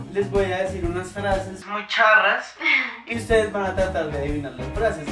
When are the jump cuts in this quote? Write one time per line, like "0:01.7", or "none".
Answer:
none